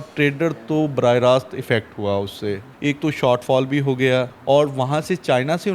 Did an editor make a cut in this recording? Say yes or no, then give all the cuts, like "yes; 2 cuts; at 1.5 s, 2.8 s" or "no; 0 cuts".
yes; 2 cuts; at 2.7 s, 4.3 s